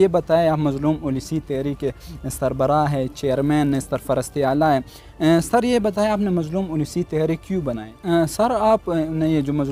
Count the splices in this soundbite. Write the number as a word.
one